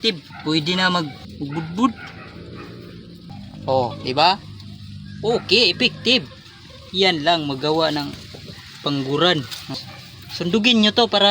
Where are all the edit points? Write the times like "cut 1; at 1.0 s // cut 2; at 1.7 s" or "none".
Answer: cut 1; at 3.3 s // cut 2; at 9.6 s